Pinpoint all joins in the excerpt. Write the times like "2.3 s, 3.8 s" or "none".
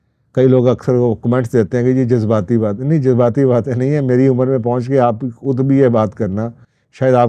none